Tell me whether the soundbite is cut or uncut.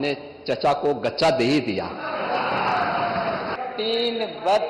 cut